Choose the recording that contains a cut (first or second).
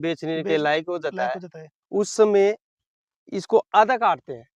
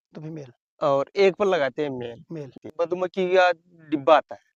second